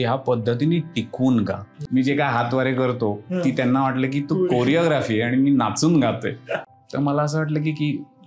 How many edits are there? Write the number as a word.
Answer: two